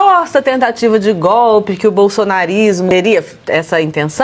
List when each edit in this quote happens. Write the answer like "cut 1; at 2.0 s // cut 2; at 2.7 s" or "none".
cut 1; at 2.9 s